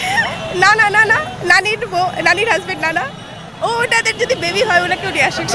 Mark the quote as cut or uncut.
cut